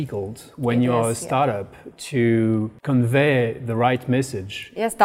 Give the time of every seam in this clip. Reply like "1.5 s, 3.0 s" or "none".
2.7 s